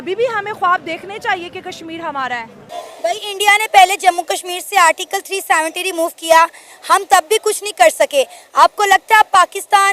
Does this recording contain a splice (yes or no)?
yes